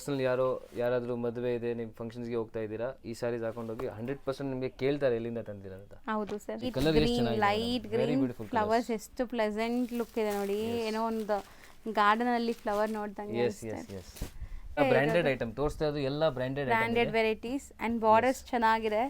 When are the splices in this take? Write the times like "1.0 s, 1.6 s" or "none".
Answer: 6.7 s, 14.8 s